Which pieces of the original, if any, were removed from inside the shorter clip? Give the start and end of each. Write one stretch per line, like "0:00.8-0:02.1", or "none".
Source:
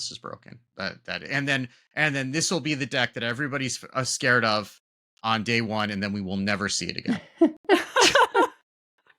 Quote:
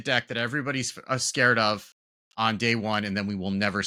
none